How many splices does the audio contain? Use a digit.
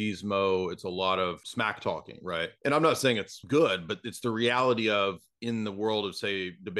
3